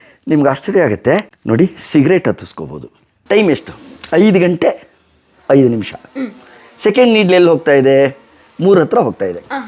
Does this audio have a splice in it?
yes; 2 cuts; at 1.3 s, 3.1 s

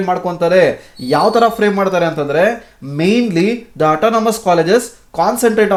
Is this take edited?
no; 0 cuts

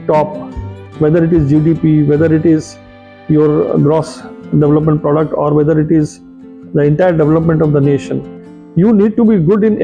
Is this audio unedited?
yes; 0 cuts

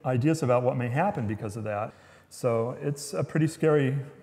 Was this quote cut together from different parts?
yes; 1 cut; at 2.0 s

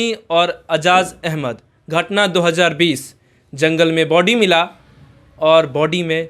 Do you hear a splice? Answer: no; 0 cuts

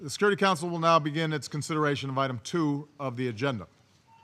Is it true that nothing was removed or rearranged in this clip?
no; 1 cut; at 3.3 s

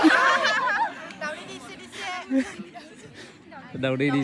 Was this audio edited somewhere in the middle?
no; 0 cuts

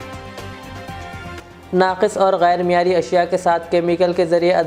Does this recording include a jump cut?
no; 0 cuts

